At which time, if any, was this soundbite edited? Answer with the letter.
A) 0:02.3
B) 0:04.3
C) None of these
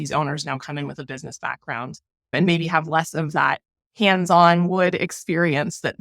A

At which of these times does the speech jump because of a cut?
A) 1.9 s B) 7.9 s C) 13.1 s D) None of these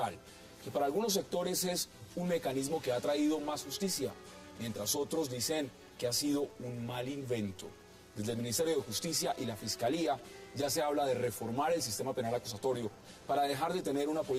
C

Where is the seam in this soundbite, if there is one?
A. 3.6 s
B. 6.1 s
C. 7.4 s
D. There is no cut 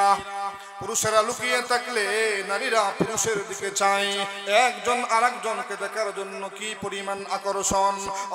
D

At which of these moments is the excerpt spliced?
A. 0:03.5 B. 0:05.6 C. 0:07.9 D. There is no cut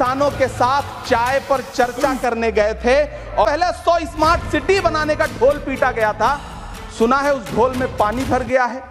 A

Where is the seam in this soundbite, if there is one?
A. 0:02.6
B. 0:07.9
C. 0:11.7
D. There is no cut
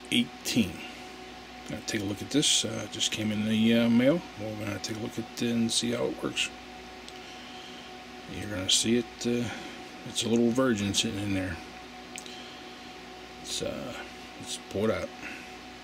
C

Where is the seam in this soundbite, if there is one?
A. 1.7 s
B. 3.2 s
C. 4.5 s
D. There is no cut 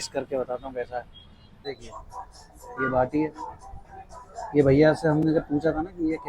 A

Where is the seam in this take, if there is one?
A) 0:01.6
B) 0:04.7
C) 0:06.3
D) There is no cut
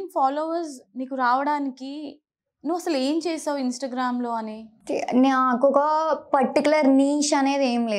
B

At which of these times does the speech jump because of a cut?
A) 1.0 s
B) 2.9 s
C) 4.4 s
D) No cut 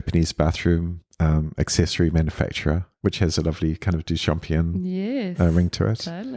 A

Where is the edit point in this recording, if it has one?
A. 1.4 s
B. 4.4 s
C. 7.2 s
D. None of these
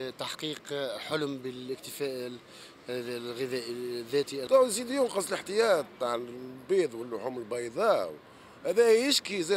B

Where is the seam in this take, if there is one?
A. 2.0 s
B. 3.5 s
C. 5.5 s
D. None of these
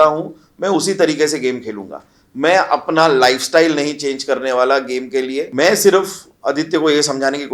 C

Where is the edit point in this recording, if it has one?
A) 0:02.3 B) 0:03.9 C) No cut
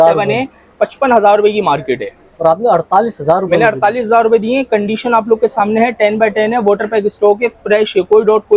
C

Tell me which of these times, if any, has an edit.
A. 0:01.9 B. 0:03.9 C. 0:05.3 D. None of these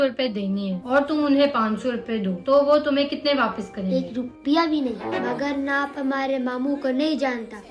C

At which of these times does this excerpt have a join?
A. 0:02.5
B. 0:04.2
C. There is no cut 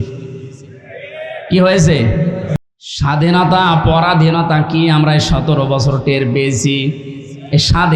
A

